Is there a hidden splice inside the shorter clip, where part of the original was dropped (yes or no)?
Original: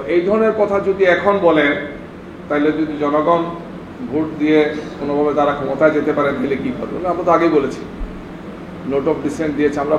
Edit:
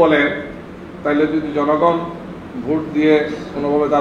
no